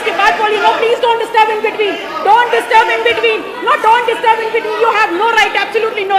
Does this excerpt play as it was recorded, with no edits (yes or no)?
yes